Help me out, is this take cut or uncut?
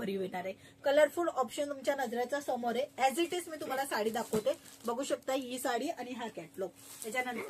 uncut